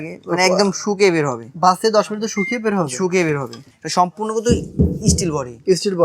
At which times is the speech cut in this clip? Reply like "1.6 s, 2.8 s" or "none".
3.7 s